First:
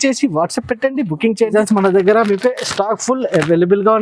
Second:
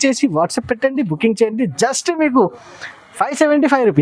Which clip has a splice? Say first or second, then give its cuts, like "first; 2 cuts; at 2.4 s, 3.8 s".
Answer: first; 1 cut; at 1.5 s